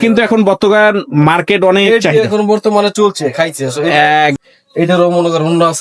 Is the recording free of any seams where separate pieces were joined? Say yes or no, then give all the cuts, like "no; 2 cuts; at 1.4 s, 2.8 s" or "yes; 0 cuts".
no; 1 cut; at 4.4 s